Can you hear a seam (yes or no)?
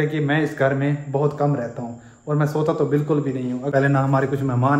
yes